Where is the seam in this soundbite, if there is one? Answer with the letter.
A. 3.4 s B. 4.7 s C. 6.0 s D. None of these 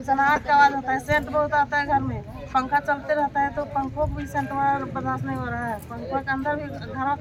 D